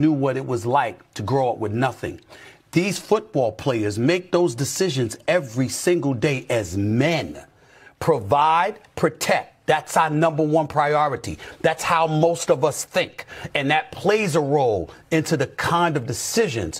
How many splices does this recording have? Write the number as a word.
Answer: zero